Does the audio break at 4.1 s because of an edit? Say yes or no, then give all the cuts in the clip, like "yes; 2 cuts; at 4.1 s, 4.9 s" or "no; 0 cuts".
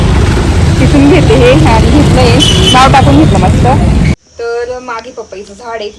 yes; 1 cut; at 4.1 s